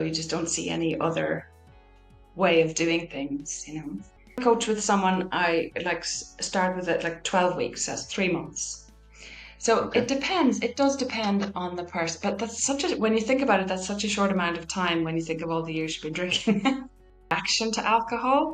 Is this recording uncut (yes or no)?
no